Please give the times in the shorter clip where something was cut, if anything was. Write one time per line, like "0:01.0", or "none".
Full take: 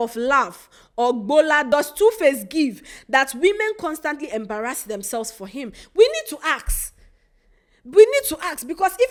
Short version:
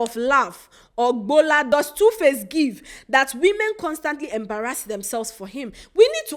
none